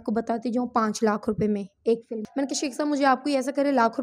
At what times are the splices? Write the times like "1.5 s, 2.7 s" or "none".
2.2 s